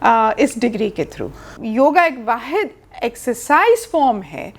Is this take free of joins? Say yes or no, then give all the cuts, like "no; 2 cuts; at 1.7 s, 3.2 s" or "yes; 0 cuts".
no; 1 cut; at 1.5 s